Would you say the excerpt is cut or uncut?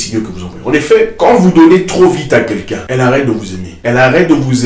cut